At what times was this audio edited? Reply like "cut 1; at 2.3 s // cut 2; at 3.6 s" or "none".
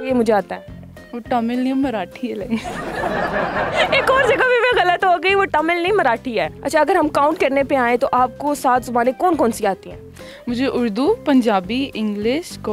cut 1; at 5.5 s // cut 2; at 6.6 s